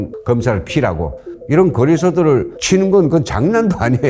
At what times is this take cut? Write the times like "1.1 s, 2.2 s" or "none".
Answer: 1.3 s, 2.5 s